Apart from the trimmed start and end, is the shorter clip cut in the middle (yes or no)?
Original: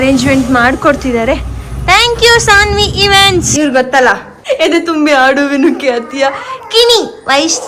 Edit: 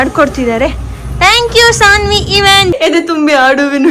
yes